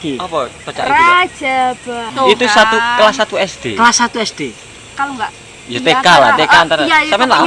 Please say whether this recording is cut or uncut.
cut